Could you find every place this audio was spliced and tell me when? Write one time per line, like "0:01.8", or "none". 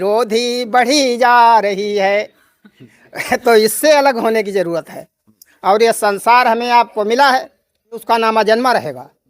0:08.0

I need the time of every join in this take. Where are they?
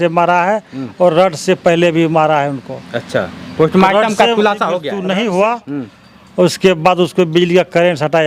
0:04.9

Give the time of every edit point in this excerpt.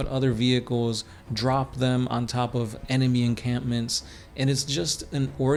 none

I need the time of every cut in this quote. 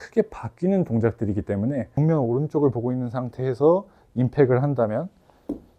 0:01.9

